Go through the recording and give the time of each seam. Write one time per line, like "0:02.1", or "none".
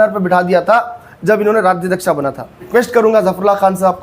0:02.7